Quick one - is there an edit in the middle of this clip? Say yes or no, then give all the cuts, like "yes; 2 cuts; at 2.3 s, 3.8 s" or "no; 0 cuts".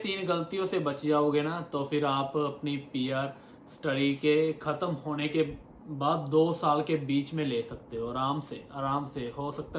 no; 0 cuts